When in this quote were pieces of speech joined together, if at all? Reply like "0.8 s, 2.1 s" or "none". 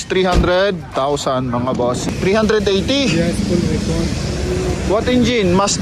2.1 s